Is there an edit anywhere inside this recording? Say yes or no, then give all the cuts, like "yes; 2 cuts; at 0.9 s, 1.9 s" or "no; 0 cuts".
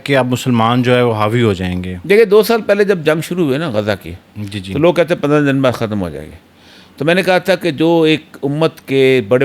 no; 0 cuts